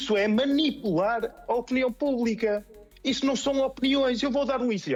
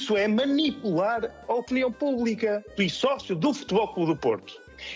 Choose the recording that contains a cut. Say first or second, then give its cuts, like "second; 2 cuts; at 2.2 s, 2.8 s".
second; 1 cut; at 2.7 s